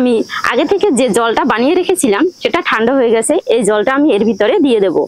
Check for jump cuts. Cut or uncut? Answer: uncut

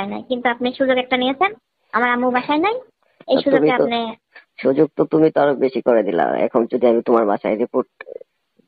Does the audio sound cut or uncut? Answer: uncut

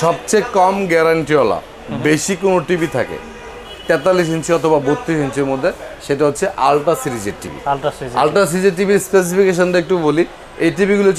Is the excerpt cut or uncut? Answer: uncut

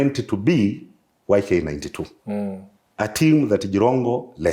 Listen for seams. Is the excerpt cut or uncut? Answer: uncut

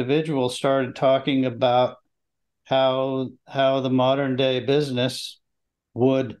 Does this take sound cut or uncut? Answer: uncut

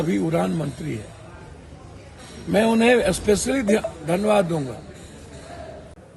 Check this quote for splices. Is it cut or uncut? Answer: uncut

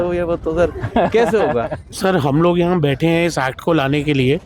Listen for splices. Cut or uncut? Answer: cut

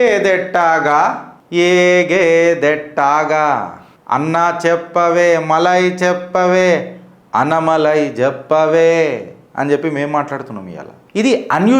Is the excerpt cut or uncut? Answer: uncut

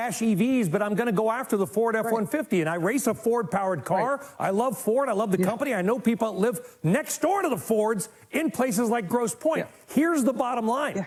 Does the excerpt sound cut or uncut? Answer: uncut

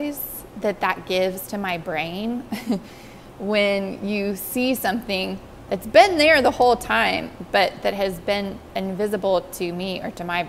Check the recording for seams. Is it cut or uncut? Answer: uncut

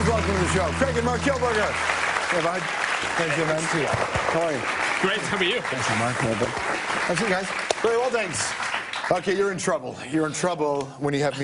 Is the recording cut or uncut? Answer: uncut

